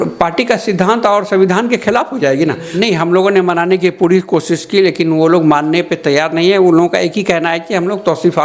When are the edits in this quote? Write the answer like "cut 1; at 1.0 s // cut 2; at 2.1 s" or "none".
cut 1; at 2.6 s